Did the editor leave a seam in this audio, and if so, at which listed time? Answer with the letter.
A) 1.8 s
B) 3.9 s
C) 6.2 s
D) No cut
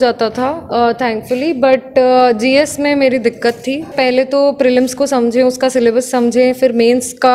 B